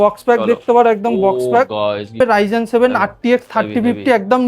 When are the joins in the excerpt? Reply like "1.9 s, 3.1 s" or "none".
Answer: 2.2 s